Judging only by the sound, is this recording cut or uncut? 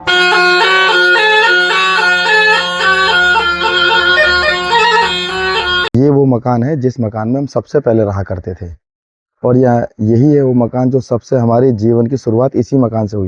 cut